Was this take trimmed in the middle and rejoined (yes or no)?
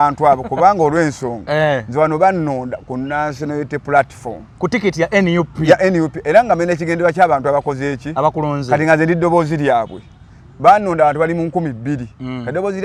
no